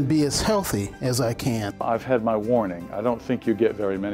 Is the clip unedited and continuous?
no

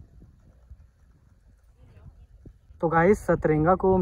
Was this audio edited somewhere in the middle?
yes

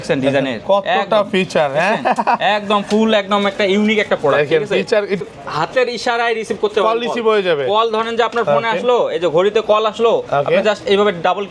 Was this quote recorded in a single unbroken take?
no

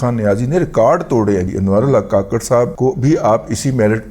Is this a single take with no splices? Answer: no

